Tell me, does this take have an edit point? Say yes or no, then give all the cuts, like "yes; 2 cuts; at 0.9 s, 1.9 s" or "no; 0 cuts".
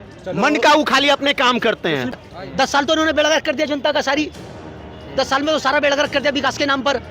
yes; 1 cut; at 2.2 s